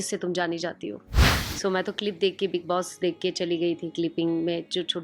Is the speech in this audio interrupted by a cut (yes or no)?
yes